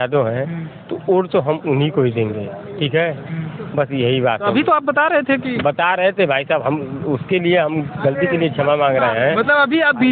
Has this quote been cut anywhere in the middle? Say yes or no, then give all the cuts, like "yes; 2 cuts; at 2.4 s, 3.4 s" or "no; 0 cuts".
no; 0 cuts